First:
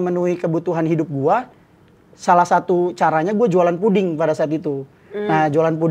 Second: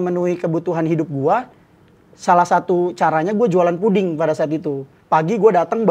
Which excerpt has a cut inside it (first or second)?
second